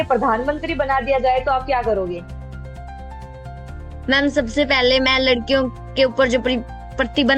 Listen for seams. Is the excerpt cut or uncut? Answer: uncut